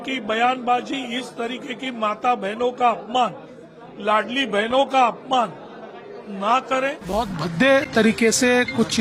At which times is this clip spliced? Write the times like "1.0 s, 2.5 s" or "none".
7.0 s